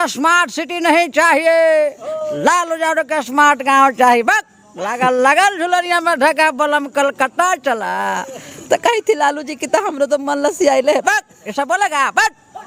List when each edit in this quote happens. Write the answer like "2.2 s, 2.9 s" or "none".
none